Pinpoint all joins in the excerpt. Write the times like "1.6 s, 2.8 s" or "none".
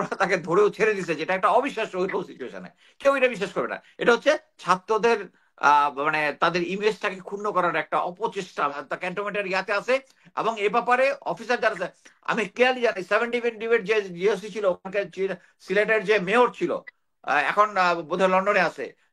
8.8 s